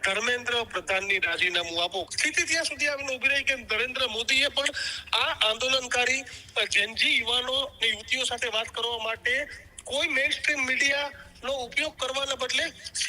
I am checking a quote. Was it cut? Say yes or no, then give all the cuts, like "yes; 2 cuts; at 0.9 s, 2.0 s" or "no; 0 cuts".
yes; 1 cut; at 2.1 s